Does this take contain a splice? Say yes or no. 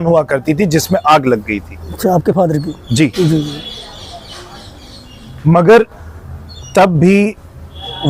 no